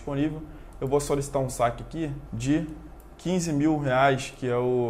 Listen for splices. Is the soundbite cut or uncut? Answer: cut